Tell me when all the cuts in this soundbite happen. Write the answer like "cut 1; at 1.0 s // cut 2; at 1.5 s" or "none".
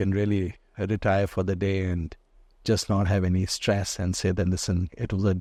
none